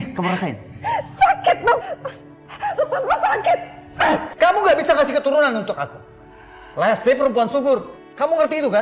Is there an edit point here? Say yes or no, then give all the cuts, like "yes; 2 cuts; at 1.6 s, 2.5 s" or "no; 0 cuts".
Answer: yes; 1 cut; at 4.3 s